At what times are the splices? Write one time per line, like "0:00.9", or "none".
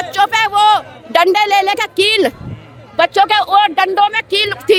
none